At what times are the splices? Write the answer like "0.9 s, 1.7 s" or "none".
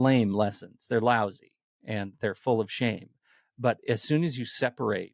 none